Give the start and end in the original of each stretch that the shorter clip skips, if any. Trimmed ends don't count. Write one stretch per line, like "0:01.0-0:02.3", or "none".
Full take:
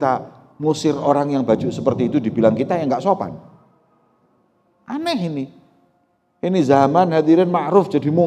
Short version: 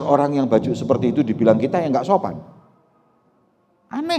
none